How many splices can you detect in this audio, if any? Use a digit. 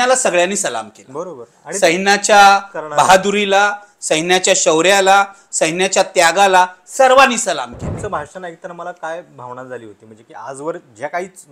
1